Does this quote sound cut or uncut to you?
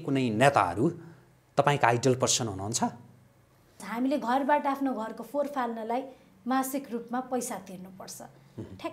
cut